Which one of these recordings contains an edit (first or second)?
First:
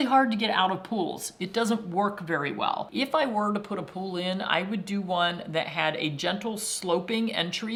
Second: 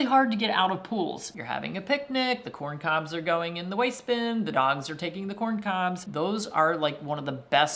second